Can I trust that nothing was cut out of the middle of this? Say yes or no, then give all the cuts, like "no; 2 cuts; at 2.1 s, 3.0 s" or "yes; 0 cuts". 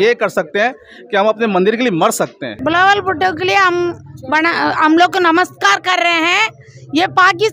no; 1 cut; at 2.5 s